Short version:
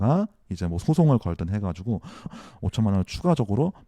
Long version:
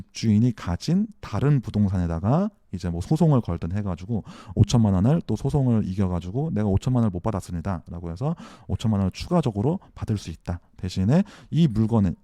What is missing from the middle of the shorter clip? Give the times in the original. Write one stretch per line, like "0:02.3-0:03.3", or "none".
0:04.5-0:08.4